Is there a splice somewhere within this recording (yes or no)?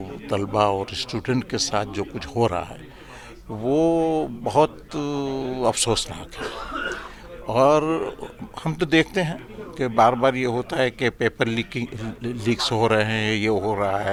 no